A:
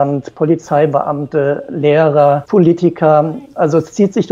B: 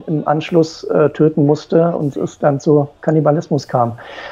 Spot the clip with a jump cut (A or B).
A